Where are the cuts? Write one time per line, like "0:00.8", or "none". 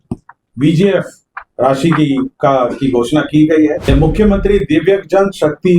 0:03.8